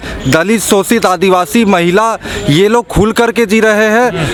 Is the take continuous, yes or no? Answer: yes